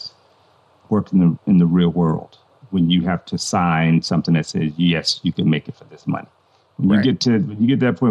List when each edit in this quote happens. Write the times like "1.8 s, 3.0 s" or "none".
none